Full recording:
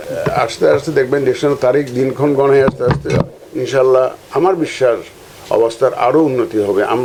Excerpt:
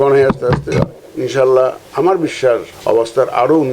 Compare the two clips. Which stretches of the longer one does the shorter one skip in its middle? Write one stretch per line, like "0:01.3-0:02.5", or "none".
0:05.1-0:05.4